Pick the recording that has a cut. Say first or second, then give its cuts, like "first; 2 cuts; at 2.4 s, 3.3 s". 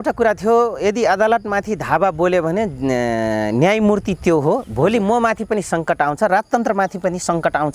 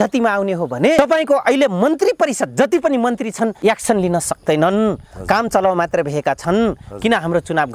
second; 2 cuts; at 1.0 s, 3.6 s